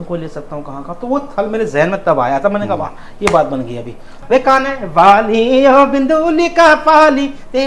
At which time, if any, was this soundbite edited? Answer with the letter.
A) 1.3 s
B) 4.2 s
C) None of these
B